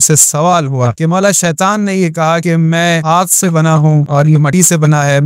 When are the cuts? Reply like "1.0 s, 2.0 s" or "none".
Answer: 0.9 s, 2.7 s, 4.4 s